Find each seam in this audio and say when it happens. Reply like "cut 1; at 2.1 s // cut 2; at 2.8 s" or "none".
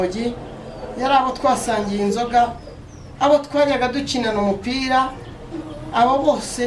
none